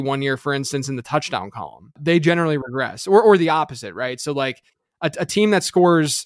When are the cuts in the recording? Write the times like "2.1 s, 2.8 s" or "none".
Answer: 2.0 s